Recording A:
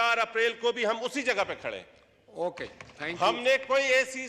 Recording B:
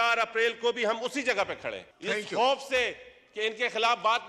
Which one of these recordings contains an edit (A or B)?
B